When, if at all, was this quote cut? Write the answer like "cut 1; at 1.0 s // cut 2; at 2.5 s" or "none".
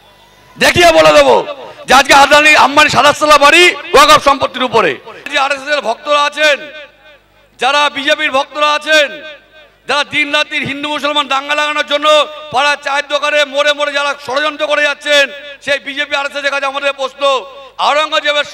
cut 1; at 5.2 s